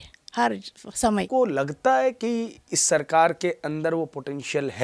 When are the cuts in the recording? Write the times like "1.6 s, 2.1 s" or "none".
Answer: 1.3 s